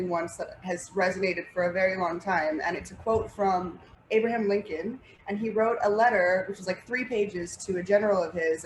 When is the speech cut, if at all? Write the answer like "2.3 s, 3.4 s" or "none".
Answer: 3.9 s